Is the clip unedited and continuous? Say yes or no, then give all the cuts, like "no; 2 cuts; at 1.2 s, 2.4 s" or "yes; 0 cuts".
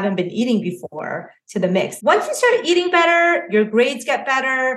no; 1 cut; at 1.9 s